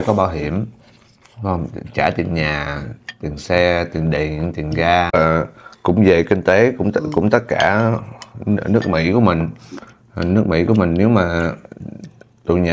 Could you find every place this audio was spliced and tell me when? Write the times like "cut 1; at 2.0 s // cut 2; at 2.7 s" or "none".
cut 1; at 5.1 s